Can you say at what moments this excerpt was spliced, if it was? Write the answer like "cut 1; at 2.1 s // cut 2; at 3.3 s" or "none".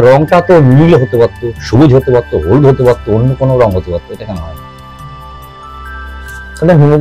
none